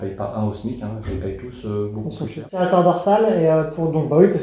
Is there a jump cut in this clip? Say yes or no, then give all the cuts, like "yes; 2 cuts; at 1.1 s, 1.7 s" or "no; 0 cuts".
yes; 1 cut; at 2.4 s